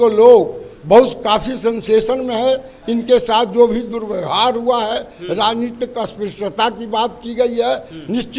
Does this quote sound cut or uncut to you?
uncut